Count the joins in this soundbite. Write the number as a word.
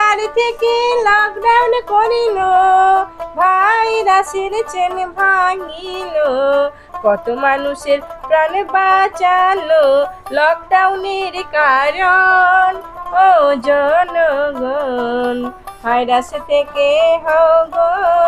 zero